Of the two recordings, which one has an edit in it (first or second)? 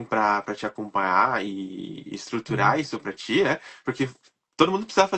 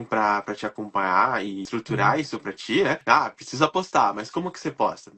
second